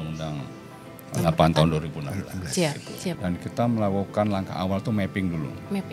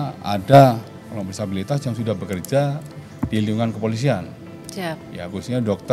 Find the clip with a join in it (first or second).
first